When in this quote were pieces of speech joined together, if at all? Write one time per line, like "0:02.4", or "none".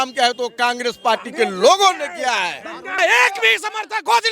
0:03.0